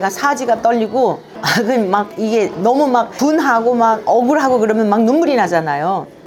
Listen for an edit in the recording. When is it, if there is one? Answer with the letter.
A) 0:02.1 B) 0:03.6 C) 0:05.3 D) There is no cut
D